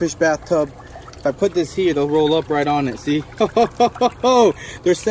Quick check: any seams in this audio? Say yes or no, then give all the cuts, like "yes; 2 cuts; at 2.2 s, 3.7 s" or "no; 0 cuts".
no; 0 cuts